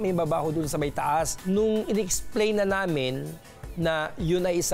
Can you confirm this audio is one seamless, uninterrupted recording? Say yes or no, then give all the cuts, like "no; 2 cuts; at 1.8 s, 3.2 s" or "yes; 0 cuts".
no; 1 cut; at 1.4 s